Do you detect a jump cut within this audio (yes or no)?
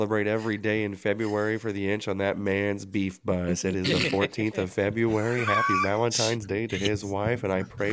no